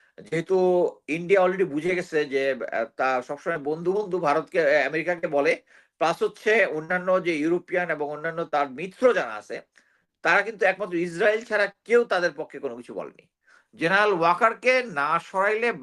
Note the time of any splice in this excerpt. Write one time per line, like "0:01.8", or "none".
0:13.4